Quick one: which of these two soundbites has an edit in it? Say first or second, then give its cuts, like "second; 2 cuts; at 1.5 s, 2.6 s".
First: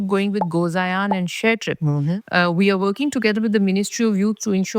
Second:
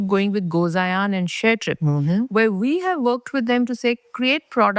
first; 1 cut; at 2.2 s